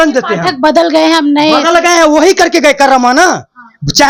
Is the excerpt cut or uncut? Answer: uncut